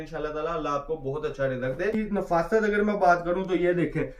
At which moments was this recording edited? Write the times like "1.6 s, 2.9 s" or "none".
1.9 s